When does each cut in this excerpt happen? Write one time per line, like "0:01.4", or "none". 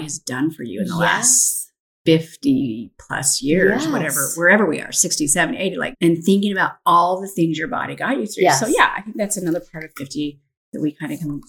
0:05.9